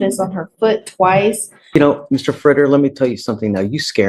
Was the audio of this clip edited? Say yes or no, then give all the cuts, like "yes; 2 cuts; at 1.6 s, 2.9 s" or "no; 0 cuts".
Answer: yes; 1 cut; at 1.7 s